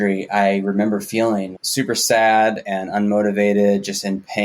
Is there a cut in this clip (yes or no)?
yes